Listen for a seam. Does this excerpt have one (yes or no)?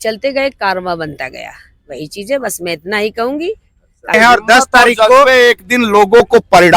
yes